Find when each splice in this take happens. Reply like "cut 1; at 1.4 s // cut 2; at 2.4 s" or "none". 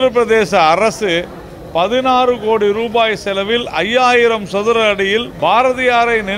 cut 1; at 5.3 s